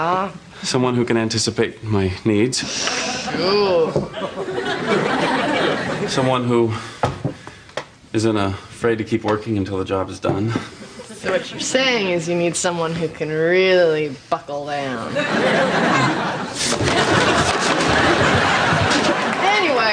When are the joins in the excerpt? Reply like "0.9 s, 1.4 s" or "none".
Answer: none